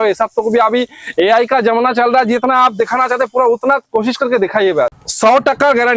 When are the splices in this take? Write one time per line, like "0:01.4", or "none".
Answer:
0:04.9